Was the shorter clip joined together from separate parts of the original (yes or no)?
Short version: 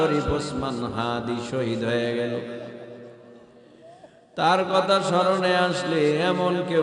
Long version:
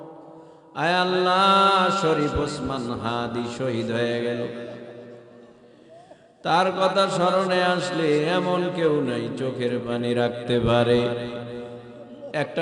no